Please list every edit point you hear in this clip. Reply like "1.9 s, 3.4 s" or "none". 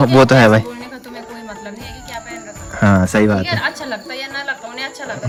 none